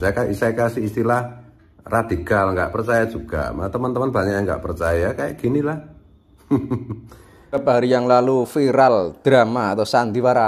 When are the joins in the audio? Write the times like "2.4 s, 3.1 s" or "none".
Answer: 7.6 s